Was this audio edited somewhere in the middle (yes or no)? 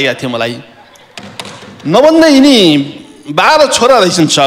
no